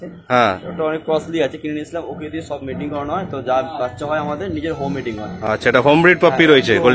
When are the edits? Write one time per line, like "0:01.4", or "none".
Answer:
none